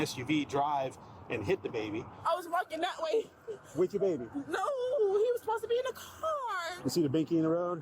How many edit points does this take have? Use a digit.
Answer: 2